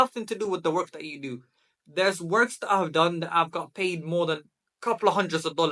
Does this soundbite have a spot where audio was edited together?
no; 0 cuts

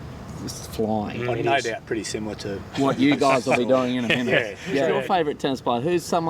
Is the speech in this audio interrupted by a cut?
yes; 1 cut; at 4.9 s

